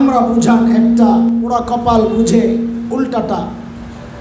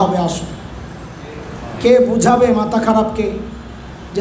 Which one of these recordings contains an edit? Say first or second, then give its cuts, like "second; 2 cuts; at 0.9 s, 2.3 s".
first; 1 cut; at 1.4 s